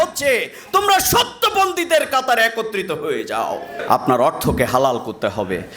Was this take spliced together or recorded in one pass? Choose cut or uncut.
cut